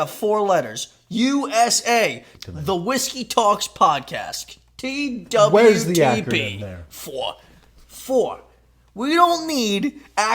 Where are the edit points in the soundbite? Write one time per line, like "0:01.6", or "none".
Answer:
0:02.3